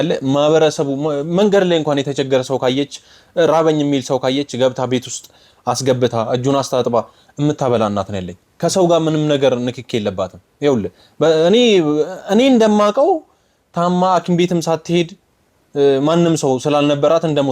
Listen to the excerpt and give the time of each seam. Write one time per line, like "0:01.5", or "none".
none